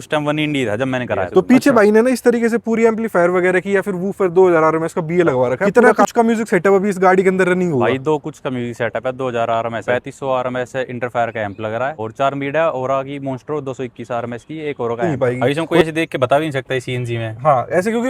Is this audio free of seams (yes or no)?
no